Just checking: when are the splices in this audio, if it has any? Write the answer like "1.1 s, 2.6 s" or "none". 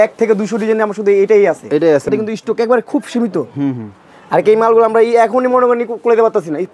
2.1 s

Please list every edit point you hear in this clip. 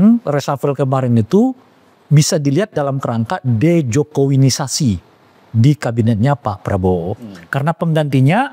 none

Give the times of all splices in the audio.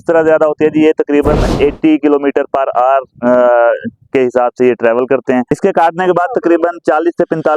5.5 s

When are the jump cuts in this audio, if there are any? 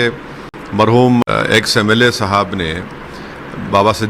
1.2 s

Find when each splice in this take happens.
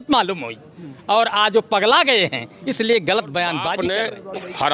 3.7 s

